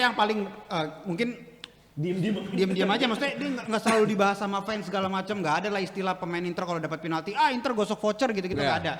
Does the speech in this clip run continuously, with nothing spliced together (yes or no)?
yes